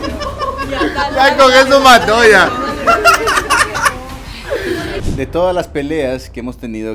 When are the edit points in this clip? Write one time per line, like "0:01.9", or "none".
0:05.0